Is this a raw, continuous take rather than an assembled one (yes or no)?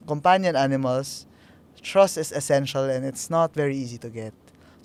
yes